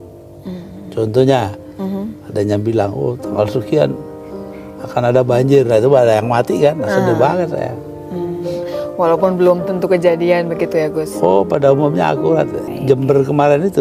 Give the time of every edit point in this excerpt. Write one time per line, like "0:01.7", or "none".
0:12.7